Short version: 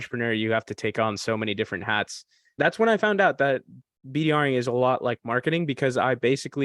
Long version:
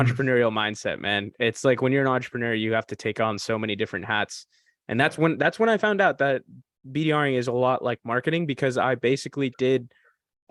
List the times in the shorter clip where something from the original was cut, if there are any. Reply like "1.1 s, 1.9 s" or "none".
2.6 s